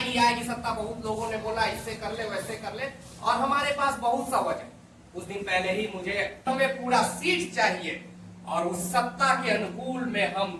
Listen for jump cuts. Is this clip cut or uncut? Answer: uncut